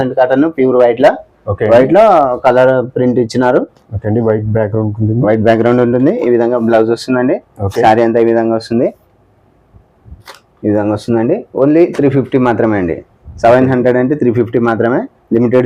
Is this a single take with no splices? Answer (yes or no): yes